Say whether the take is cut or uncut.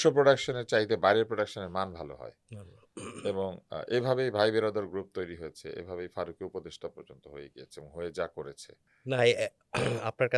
uncut